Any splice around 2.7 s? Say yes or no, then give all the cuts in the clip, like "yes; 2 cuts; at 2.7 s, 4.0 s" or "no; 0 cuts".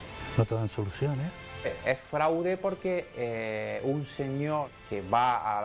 no; 2 cuts; at 1.4 s, 4.7 s